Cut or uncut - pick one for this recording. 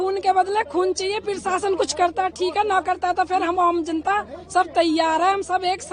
uncut